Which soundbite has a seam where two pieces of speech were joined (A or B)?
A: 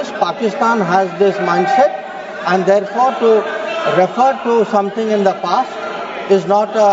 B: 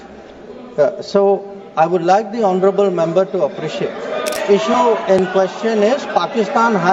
B